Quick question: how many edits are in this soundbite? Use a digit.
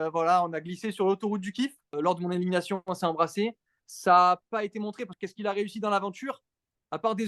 2